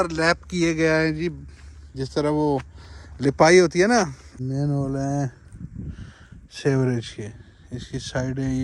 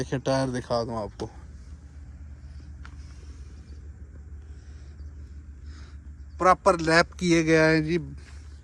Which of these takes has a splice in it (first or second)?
first